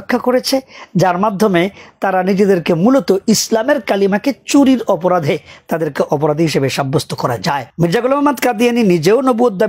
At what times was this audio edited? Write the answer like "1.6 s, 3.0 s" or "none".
7.7 s